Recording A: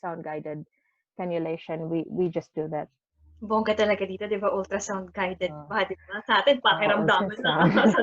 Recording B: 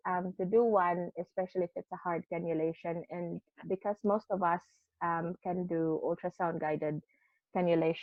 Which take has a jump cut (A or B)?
A